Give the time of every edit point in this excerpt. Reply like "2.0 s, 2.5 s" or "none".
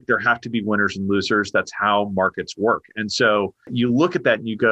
3.7 s